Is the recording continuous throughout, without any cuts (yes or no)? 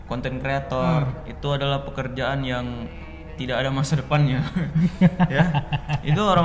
yes